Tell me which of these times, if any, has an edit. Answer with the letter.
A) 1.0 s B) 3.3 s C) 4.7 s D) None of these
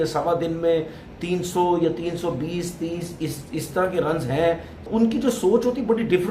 C